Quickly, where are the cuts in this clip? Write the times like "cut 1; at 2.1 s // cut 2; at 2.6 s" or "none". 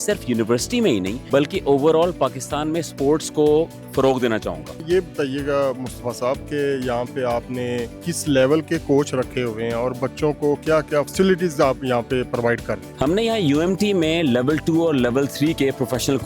cut 1; at 1.2 s // cut 2; at 4.8 s // cut 3; at 8.0 s

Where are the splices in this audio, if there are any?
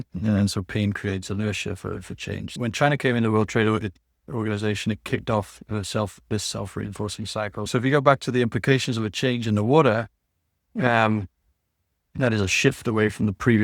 cut 1; at 2.5 s // cut 2; at 7.7 s

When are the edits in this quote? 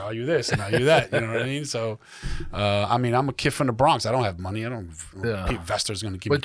none

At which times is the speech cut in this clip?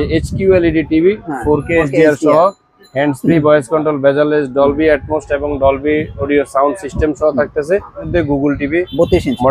cut 1; at 8.1 s

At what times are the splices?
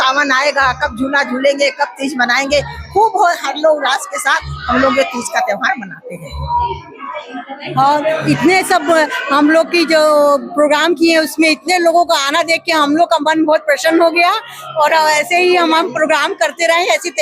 none

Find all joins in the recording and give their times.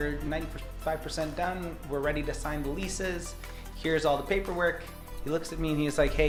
none

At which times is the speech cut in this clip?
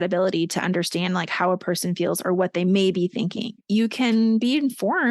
cut 1; at 3.5 s

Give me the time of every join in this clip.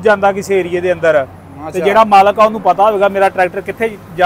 none

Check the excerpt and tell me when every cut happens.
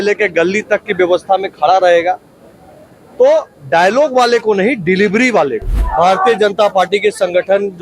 cut 1; at 5.7 s

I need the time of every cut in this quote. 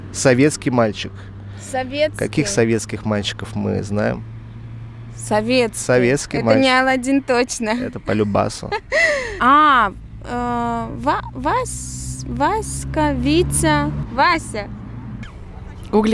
cut 1; at 9.3 s // cut 2; at 14.0 s // cut 3; at 15.2 s

